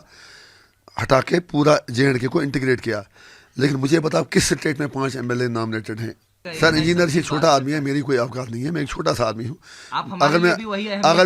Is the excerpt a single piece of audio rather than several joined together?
no; 1 cut; at 6.4 s

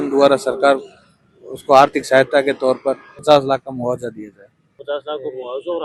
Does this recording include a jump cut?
no; 0 cuts

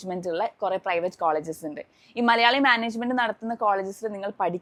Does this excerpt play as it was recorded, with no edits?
yes; 0 cuts

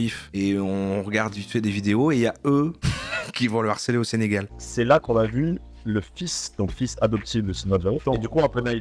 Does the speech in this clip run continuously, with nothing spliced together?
no; 1 cut; at 4.4 s

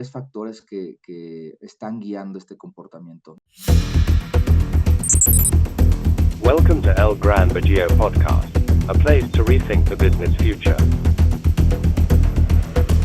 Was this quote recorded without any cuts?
no; 1 cut; at 3.3 s

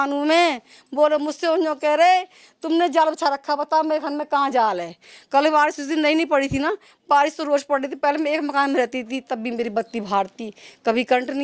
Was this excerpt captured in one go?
yes; 0 cuts

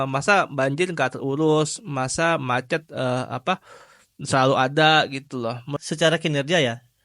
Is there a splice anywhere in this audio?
yes; 1 cut; at 5.7 s

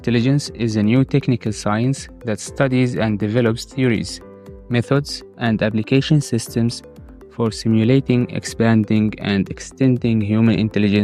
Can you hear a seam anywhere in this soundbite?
no; 0 cuts

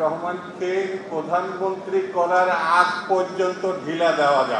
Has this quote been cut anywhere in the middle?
no; 0 cuts

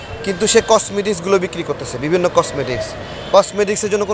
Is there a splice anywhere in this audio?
no; 0 cuts

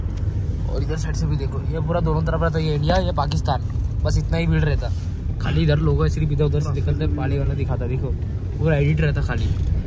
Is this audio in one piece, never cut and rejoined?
yes; 0 cuts

